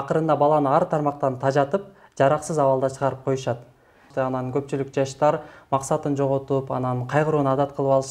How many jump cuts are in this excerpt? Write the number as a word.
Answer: one